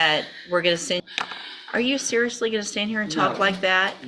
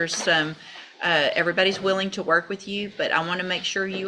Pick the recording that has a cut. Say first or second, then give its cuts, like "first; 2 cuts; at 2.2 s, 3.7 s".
first; 1 cut; at 1.0 s